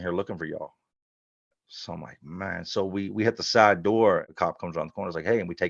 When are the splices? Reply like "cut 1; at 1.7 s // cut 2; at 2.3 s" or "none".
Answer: cut 1; at 4.3 s

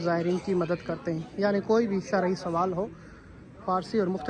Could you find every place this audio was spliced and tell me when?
none

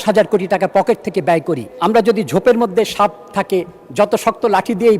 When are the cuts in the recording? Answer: cut 1; at 1.7 s

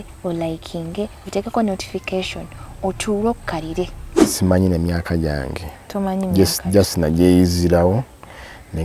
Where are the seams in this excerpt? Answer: cut 1; at 4.3 s

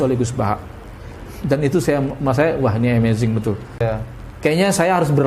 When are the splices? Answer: cut 1; at 3.8 s

